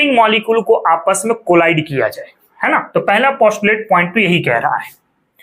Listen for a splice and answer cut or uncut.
uncut